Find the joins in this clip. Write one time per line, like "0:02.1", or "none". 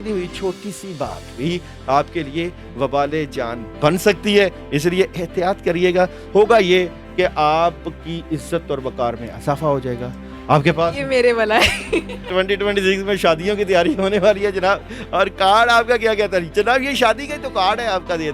0:06.2
0:12.2